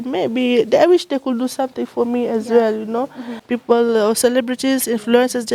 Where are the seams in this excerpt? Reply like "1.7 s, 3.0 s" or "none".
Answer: 3.4 s